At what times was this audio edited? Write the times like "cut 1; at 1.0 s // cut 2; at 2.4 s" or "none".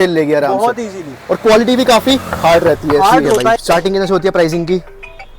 cut 1; at 3.6 s